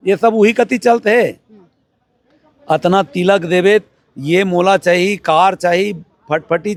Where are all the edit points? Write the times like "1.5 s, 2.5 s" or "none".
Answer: none